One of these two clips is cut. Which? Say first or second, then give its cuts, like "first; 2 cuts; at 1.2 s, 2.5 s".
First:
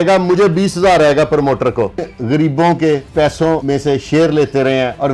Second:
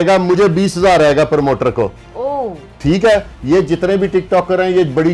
first; 2 cuts; at 2.1 s, 3.4 s